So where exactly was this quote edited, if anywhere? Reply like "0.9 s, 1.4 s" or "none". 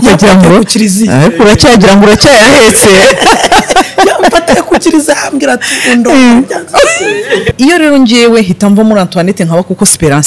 7.5 s